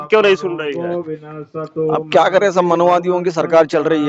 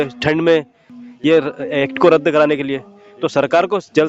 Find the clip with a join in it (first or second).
second